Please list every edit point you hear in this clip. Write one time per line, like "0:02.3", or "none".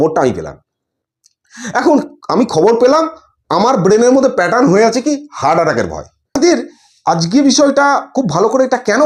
0:06.4